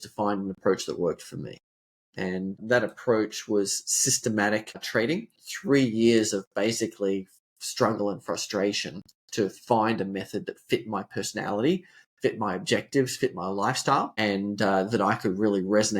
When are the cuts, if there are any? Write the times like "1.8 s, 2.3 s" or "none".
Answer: 5.4 s